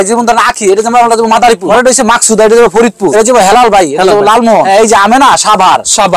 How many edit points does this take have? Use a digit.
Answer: 3